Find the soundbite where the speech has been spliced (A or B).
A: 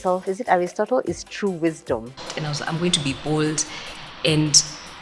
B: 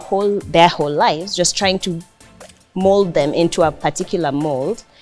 A